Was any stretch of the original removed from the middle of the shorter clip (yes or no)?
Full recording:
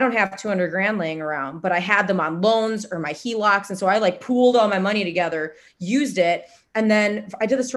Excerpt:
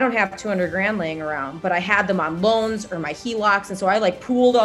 no